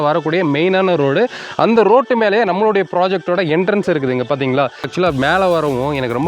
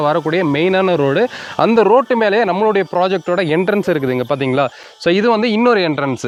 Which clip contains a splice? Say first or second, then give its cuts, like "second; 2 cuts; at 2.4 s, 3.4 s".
first; 1 cut; at 4.9 s